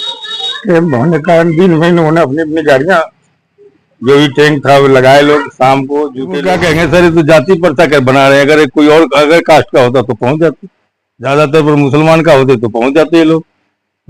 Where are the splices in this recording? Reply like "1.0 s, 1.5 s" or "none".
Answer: 6.2 s